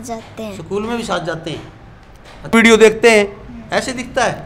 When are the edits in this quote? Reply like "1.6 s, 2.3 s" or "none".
2.5 s